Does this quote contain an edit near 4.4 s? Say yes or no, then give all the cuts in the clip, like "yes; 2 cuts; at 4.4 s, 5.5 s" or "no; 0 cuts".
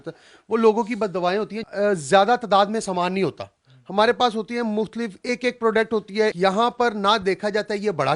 no; 2 cuts; at 1.6 s, 6.3 s